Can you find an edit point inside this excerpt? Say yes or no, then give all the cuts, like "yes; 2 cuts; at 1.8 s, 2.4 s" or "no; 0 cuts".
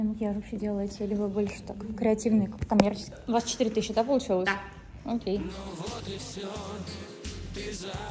yes; 2 cuts; at 3.1 s, 5.4 s